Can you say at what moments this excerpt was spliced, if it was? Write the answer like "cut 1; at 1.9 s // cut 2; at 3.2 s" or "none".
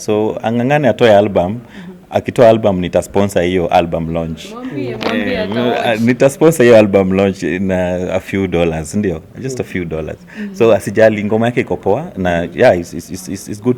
none